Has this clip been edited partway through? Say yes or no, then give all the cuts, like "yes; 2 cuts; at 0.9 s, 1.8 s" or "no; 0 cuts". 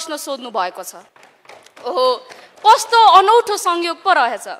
no; 0 cuts